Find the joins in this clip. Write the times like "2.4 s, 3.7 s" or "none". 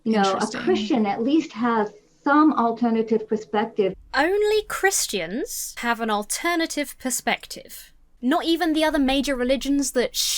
4.0 s, 5.6 s

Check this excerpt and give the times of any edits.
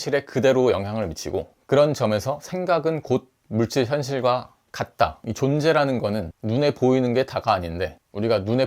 5.2 s

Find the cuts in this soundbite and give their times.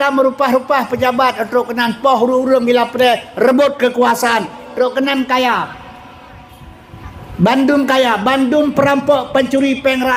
none

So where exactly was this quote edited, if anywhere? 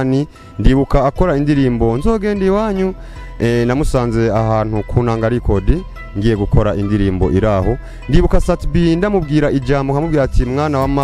none

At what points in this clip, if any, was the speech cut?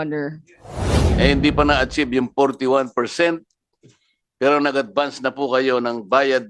1.0 s

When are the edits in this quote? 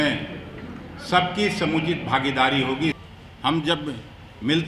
3.0 s

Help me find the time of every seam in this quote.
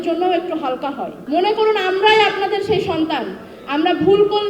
1.1 s

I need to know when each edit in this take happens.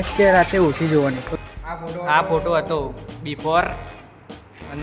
1.3 s

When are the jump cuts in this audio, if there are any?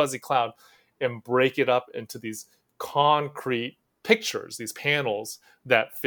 none

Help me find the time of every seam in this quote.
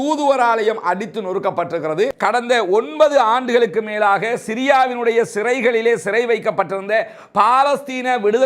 2.1 s

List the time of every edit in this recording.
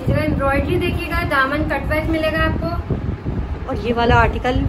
none

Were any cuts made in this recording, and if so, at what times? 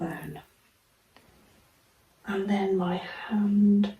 1.2 s

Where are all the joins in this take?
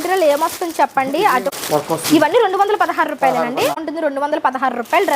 1.5 s, 3.9 s

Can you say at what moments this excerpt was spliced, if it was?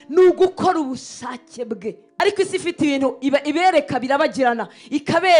2.1 s

